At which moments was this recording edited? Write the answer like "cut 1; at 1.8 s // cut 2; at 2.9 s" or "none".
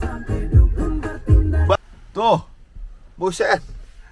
cut 1; at 1.8 s